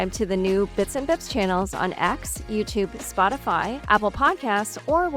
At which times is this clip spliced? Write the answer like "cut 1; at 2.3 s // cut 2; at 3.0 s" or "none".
none